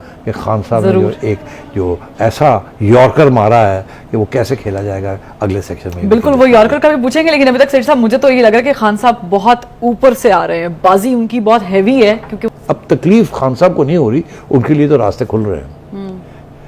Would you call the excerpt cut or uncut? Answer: cut